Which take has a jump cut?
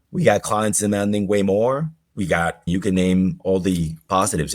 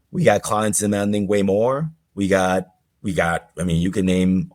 first; 1 cut; at 2.2 s

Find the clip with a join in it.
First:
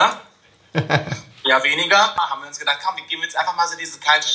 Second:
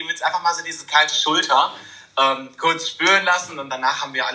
first; 1 cut; at 2.1 s

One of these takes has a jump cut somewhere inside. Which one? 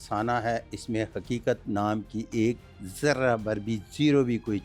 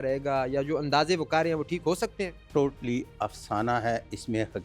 second; 1 cut; at 2.4 s

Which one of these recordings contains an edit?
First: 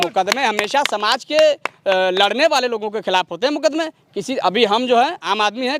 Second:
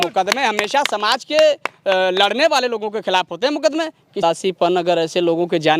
second; 1 cut; at 4.2 s

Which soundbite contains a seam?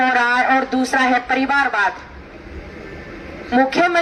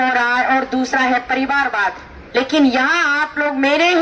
second; 1 cut; at 2.1 s

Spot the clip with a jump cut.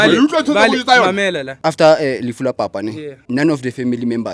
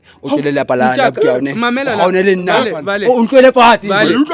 first; 2 cuts; at 1.5 s, 3.1 s

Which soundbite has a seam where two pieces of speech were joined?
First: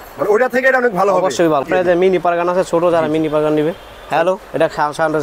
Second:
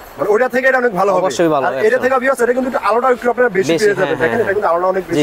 first; 1 cut; at 1.7 s

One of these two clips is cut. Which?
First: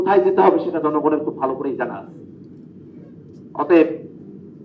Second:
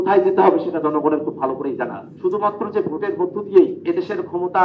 second; 2 cuts; at 2.0 s, 3.8 s

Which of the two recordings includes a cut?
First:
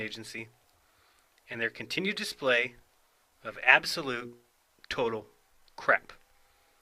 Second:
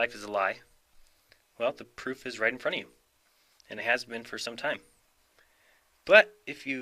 first; 1 cut; at 2.0 s

